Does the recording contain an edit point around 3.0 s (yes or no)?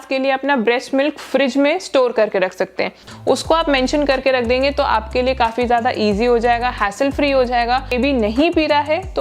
yes